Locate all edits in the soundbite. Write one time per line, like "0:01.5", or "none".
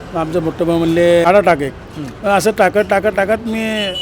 0:01.3

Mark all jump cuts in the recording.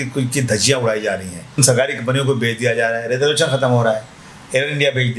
0:01.6

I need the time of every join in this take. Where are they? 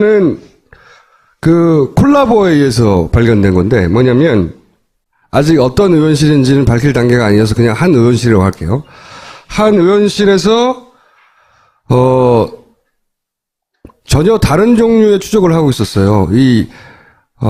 0:15.5

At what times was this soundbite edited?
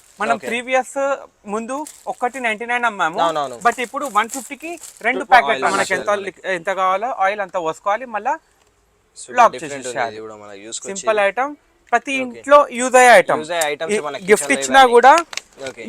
0:05.6

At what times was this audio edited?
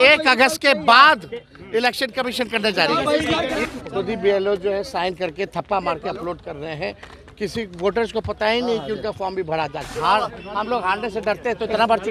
0:03.7
0:09.9

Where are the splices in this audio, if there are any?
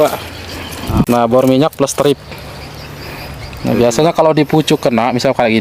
0:01.1

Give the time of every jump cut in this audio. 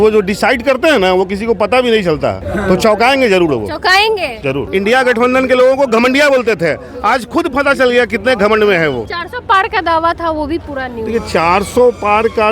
0:02.4
0:04.6
0:09.2

